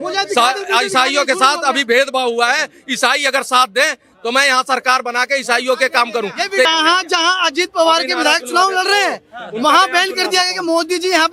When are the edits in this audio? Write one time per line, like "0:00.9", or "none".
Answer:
0:06.7